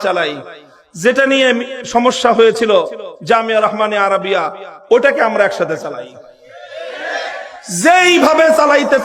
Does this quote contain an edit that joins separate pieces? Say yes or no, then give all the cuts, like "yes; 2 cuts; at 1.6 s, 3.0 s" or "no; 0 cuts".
no; 0 cuts